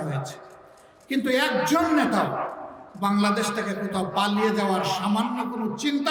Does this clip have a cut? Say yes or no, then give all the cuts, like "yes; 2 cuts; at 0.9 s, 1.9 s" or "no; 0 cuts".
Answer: no; 0 cuts